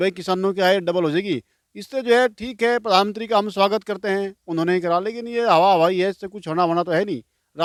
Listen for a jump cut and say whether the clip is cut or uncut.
uncut